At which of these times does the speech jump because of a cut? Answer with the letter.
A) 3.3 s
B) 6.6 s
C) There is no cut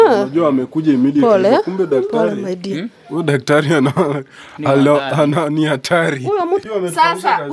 B